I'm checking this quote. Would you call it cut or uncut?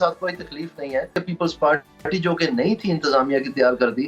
cut